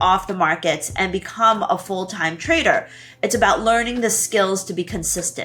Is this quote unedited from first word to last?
yes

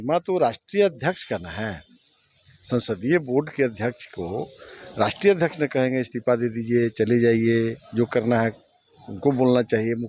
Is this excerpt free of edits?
yes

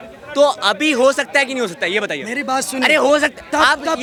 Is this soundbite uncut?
yes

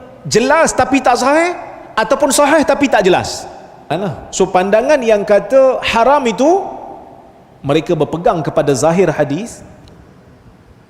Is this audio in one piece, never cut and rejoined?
no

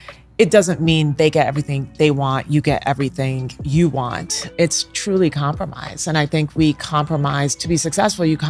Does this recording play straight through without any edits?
yes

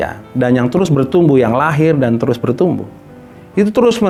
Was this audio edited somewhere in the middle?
no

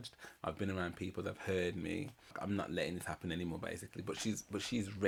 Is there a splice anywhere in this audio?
no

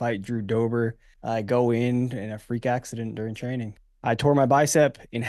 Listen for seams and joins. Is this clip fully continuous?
no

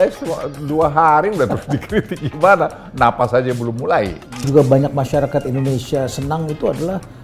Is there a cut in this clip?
yes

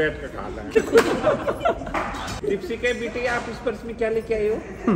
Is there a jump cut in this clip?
yes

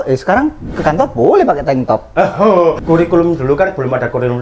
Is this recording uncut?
no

